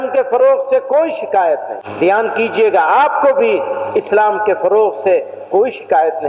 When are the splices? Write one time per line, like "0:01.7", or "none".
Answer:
0:01.8